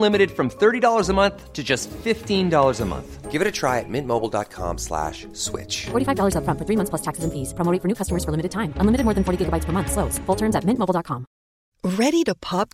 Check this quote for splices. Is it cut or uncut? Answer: uncut